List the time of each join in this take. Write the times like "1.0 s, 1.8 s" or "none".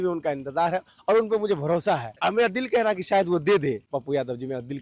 2.1 s, 3.9 s